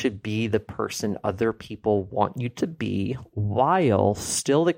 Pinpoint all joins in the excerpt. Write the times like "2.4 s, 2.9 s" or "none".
none